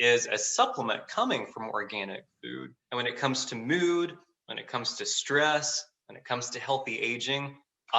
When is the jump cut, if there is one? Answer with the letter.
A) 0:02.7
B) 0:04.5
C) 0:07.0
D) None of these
A